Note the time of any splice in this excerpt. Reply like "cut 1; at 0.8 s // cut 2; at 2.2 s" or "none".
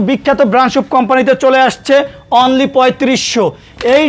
none

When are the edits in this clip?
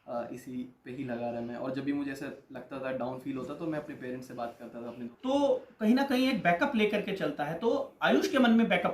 cut 1; at 5.1 s

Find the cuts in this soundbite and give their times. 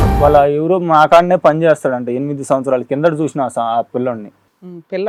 none

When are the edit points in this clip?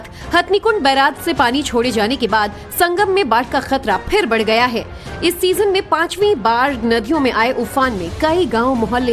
none

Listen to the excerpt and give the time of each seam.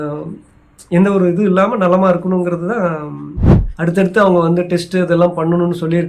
cut 1; at 3.4 s

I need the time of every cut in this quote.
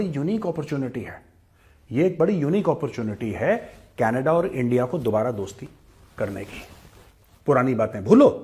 none

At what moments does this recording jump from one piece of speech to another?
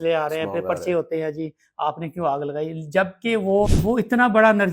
cut 1; at 3.8 s

